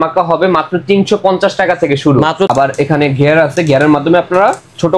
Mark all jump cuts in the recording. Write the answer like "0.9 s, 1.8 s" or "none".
2.5 s